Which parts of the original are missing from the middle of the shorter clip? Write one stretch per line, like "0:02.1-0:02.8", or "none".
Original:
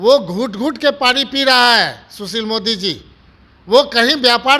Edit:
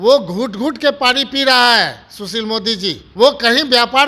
0:03.0-0:03.6